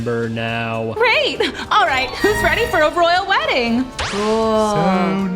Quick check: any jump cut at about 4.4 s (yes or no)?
no